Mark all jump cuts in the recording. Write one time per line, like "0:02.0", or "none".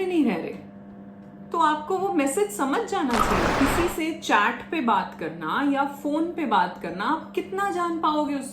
0:03.5